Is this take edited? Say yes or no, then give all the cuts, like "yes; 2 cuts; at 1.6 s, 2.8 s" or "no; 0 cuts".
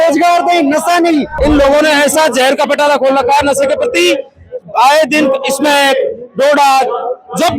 yes; 1 cut; at 1.3 s